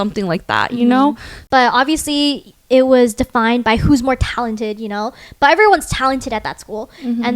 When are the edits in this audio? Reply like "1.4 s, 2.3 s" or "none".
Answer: 1.3 s